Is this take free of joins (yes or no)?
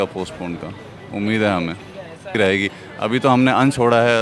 no